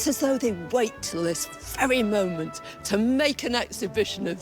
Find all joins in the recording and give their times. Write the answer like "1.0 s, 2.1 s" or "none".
none